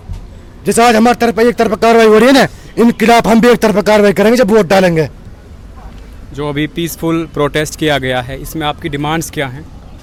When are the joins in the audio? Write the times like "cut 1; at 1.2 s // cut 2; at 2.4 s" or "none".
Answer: none